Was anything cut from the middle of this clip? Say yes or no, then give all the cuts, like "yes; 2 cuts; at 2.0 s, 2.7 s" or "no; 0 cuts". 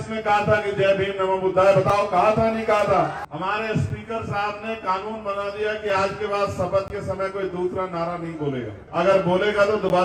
yes; 2 cuts; at 3.2 s, 8.8 s